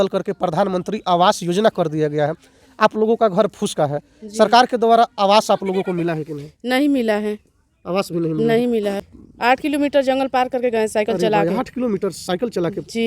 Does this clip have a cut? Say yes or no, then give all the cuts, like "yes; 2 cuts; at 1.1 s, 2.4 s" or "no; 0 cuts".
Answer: yes; 1 cut; at 9.0 s